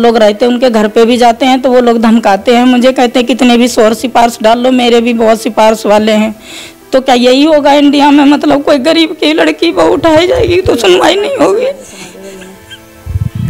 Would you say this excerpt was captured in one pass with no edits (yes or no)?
yes